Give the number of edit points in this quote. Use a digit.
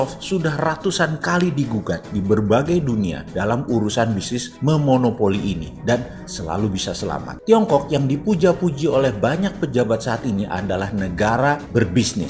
1